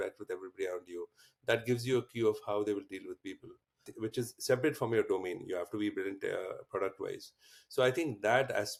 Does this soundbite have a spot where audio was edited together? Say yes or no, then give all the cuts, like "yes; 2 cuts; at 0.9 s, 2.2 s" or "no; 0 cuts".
no; 0 cuts